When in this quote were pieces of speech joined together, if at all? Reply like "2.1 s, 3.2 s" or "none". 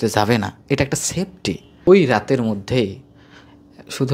1.9 s